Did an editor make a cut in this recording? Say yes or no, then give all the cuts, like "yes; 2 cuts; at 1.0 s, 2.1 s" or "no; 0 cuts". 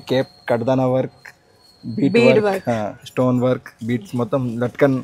no; 0 cuts